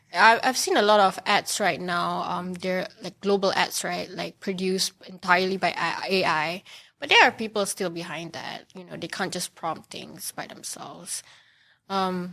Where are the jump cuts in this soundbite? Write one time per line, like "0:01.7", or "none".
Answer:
none